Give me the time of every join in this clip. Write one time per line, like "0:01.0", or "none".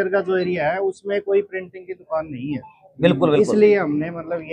none

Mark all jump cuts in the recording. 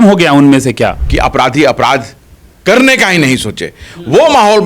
0:01.0

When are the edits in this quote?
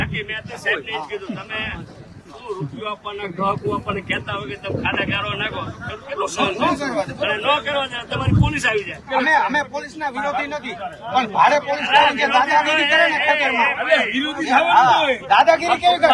0:09.0
0:15.2

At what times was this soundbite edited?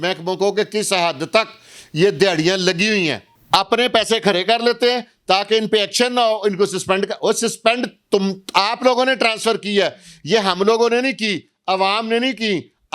0:03.3

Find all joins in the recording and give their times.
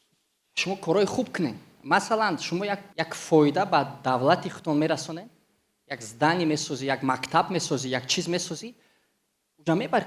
0:02.9

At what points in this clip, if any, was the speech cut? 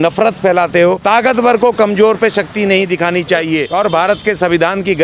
0:01.0
0:03.7

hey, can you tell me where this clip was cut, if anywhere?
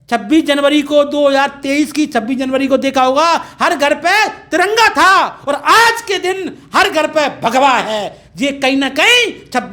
none

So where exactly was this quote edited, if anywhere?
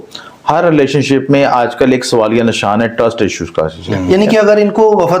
0:04.0

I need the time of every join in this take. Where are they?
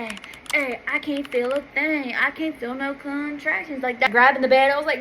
0:04.1

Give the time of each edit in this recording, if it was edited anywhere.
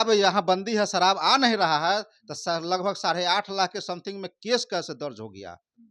none

